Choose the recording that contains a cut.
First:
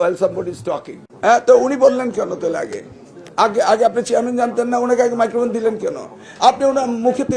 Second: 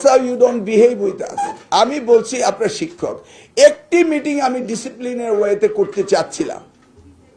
first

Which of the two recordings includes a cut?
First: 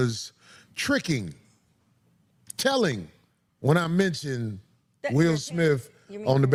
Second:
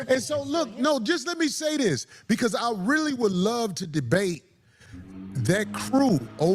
second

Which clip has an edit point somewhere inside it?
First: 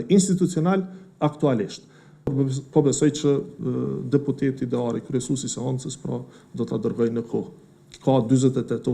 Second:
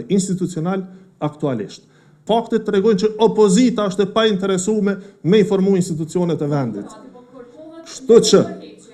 first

